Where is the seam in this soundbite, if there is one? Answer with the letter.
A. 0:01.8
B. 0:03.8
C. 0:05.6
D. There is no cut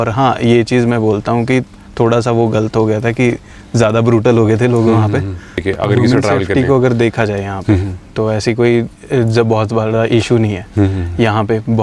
C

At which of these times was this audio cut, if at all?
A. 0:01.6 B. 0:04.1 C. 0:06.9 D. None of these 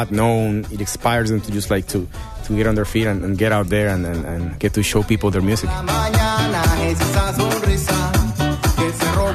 D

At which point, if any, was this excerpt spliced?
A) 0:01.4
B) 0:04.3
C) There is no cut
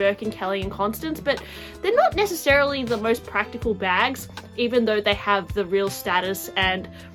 C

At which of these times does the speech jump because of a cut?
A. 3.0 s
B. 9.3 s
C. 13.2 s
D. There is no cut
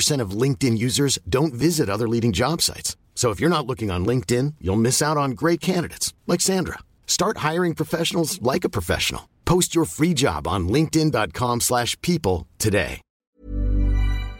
C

